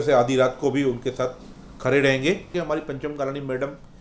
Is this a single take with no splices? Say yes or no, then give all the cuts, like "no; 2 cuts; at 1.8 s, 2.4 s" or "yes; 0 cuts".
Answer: no; 1 cut; at 2.6 s